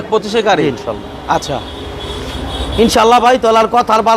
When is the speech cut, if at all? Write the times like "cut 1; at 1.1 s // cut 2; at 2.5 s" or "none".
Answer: none